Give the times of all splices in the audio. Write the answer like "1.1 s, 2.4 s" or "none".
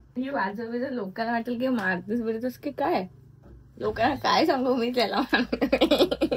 none